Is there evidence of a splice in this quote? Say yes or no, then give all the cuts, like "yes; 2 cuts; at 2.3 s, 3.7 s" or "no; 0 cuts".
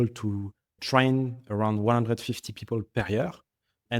no; 0 cuts